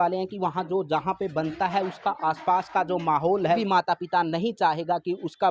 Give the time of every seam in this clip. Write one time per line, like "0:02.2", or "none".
0:03.6